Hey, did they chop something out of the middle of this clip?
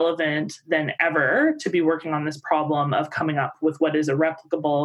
no; 0 cuts

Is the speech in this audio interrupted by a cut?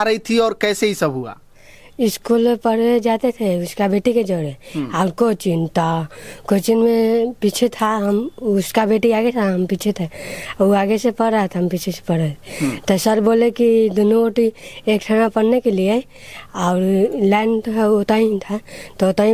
no; 0 cuts

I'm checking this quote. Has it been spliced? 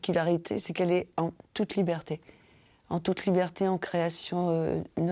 no; 0 cuts

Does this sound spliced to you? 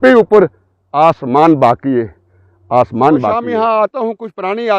yes; 1 cut; at 3.4 s

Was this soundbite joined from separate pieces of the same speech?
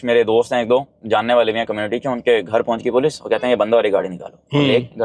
no; 0 cuts

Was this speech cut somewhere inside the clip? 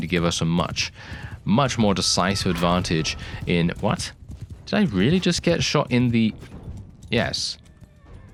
no; 0 cuts

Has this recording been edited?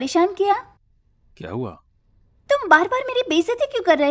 no; 0 cuts

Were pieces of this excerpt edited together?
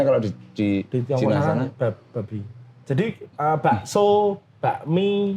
no; 0 cuts

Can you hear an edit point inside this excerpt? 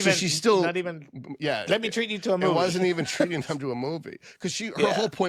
no; 0 cuts

